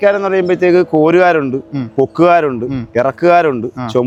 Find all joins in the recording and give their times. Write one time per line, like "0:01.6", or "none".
none

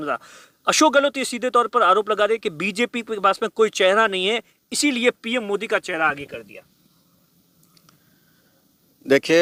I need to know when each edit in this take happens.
none

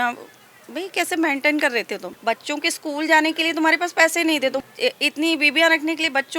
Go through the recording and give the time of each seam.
0:02.1
0:04.6

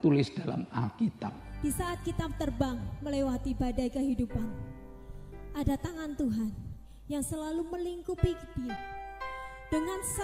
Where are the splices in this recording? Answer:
0:01.5

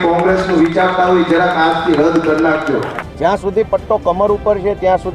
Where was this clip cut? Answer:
0:03.0

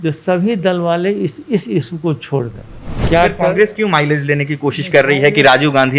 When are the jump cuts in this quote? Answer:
0:03.0

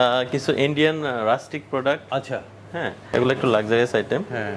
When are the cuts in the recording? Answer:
0:03.0

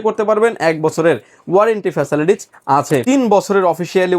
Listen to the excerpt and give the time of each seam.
0:03.0

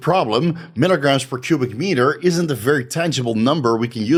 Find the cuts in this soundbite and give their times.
none

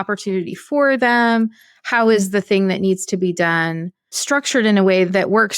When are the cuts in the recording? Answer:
0:04.2

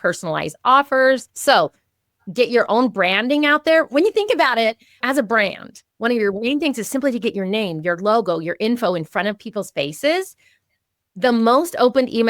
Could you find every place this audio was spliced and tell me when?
0:01.3
0:05.0

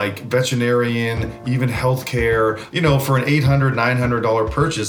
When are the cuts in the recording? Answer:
0:02.6

